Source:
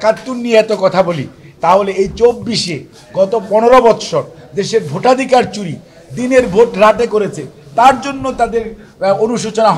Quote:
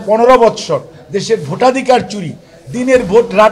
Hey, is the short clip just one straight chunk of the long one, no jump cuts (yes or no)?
yes